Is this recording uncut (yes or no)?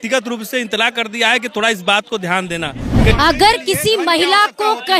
no